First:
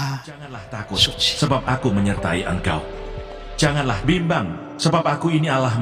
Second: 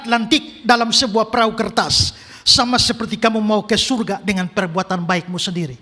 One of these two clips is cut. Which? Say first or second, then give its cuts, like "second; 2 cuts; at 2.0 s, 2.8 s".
first; 1 cut; at 1.4 s